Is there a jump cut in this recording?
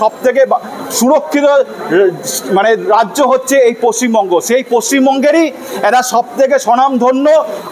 no; 0 cuts

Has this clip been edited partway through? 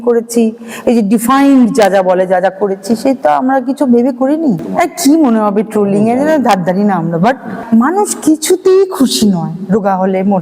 yes; 2 cuts; at 4.7 s, 7.5 s

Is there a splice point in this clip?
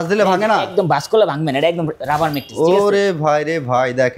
no; 0 cuts

